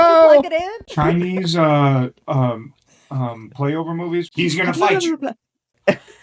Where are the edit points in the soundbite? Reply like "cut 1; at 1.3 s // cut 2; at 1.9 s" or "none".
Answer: cut 1; at 4.3 s

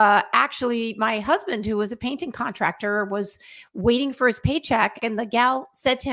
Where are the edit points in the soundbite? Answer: cut 1; at 5.0 s

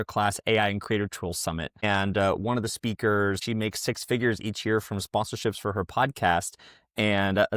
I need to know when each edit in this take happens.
cut 1; at 1.8 s // cut 2; at 3.4 s

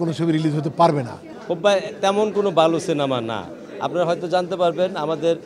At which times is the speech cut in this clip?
cut 1; at 1.3 s

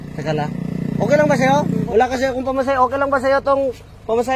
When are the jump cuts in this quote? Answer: cut 1; at 1.8 s

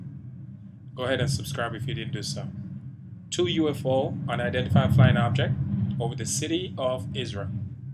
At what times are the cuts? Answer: none

